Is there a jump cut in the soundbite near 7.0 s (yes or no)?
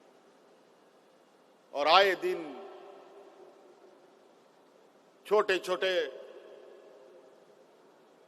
no